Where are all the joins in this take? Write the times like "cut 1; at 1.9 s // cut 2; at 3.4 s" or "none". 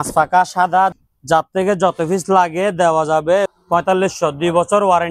cut 1; at 0.9 s // cut 2; at 3.5 s